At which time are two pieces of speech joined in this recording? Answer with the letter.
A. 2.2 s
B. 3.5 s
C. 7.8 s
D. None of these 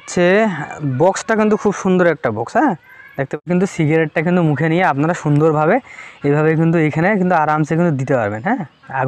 B